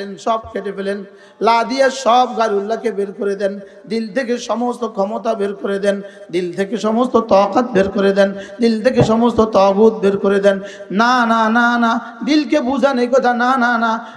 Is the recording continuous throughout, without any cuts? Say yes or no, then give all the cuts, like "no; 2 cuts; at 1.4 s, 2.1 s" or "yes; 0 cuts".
yes; 0 cuts